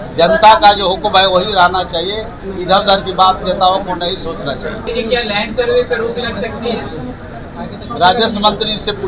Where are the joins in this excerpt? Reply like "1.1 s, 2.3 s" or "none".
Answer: 4.8 s